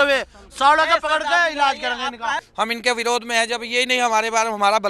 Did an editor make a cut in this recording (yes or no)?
yes